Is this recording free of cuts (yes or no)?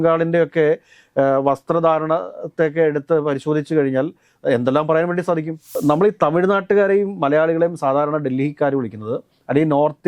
no